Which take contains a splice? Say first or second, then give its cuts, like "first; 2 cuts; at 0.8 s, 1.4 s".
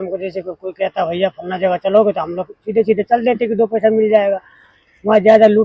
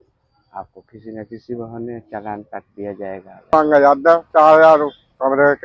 second; 1 cut; at 3.5 s